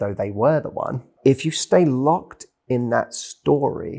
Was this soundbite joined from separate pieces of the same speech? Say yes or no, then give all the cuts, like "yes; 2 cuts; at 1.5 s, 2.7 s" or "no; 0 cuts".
yes; 1 cut; at 1.1 s